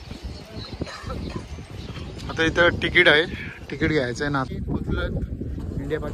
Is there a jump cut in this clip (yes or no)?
yes